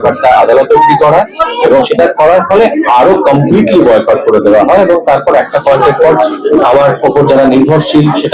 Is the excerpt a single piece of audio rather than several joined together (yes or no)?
yes